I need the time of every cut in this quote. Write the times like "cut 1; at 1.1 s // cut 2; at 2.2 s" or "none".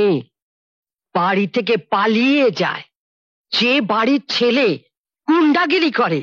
none